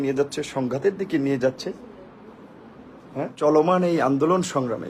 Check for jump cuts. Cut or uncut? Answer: cut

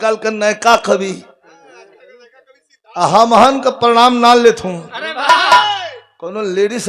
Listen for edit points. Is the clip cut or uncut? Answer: uncut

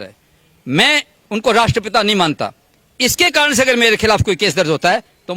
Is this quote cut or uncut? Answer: uncut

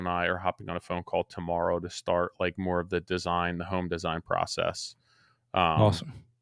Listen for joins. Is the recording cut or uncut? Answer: uncut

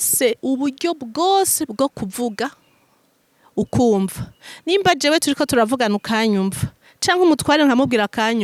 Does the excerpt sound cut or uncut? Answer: uncut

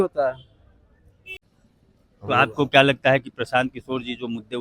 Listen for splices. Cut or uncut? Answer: cut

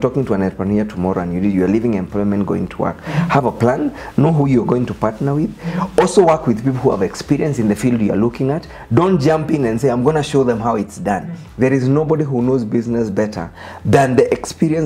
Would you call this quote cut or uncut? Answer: uncut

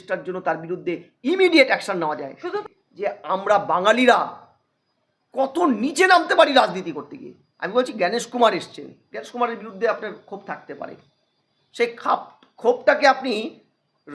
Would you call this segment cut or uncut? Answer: cut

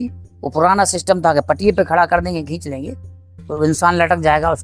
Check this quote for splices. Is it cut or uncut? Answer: uncut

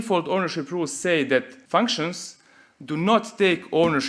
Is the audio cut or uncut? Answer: cut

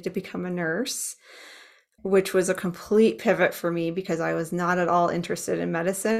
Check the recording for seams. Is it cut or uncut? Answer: uncut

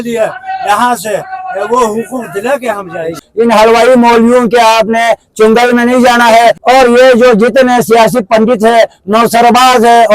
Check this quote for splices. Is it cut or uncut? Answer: cut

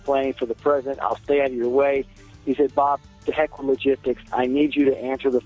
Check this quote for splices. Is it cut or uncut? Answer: uncut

